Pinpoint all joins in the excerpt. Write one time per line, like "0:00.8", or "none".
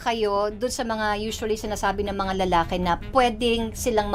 none